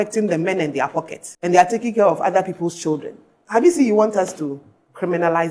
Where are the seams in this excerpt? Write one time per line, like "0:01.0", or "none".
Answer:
0:01.2